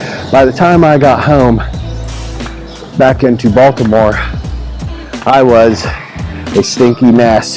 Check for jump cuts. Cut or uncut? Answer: uncut